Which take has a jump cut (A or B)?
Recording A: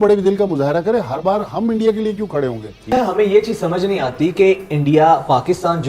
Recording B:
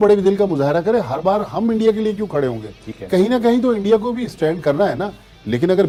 A